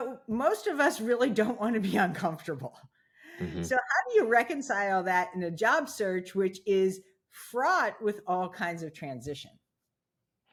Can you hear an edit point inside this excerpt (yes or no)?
no